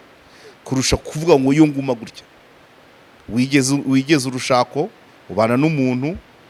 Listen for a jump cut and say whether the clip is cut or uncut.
uncut